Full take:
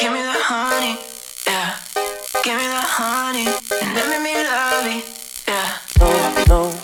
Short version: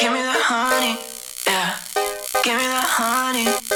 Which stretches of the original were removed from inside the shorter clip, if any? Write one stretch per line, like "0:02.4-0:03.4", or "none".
none